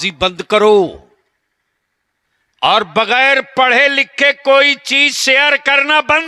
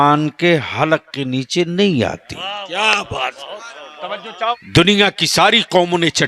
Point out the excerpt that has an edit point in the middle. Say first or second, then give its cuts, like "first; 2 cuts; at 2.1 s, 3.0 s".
second; 1 cut; at 4.5 s